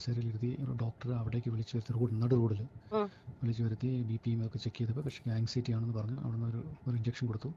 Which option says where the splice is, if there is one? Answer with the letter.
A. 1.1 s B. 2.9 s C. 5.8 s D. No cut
D